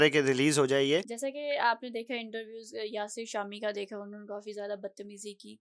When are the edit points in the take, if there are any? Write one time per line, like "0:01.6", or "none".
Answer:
0:01.2

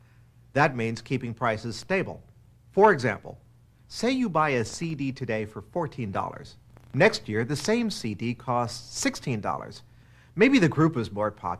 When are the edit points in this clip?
0:09.8

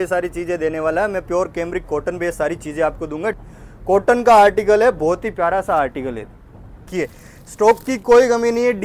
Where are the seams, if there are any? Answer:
0:03.4
0:06.9

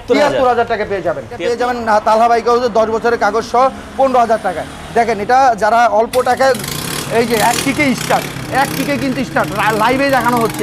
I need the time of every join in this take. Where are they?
0:01.8

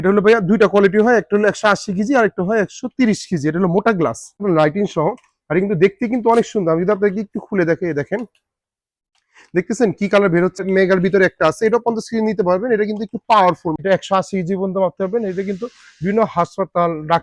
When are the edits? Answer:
0:04.4
0:10.6
0:13.8

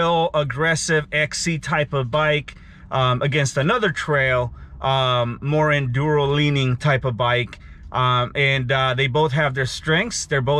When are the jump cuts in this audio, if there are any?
none

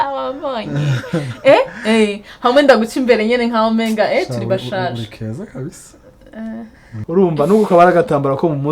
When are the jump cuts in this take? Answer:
0:06.9

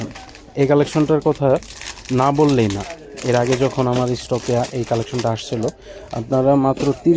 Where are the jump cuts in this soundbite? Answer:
none

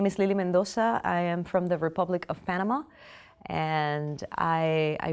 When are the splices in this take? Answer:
0:01.0

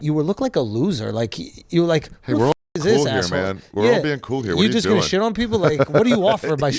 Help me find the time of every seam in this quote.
none

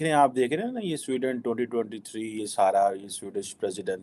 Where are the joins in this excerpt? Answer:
none

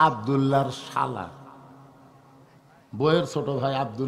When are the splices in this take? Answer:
none

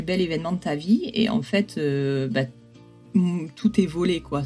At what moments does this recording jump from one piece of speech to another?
none

